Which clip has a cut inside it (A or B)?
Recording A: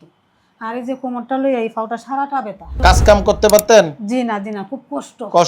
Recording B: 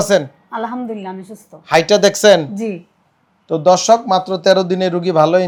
A